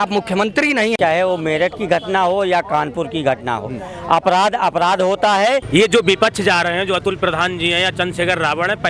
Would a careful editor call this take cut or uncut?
cut